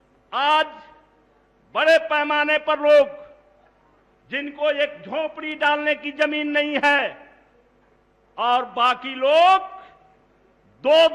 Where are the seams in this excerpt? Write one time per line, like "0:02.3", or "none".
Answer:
none